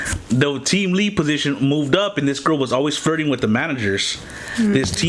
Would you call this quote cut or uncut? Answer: uncut